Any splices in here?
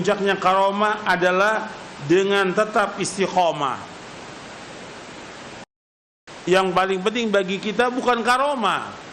yes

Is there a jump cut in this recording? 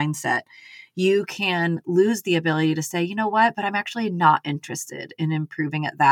no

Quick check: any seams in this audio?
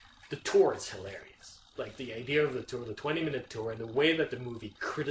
no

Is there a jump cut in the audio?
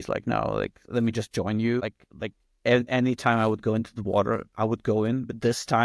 yes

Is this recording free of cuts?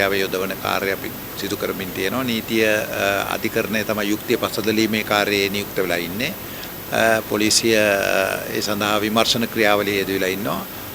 yes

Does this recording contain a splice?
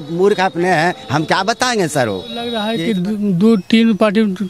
yes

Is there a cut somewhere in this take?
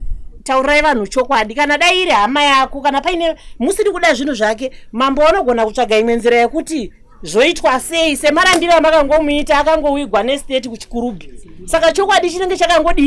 no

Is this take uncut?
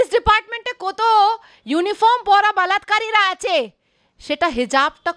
yes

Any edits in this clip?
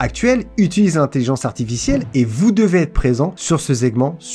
no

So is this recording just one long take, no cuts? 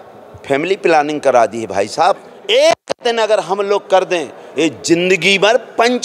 no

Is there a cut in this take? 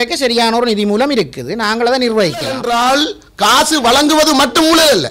yes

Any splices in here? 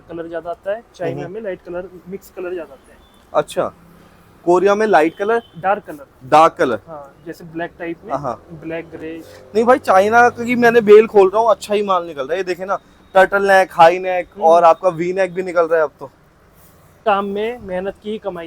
yes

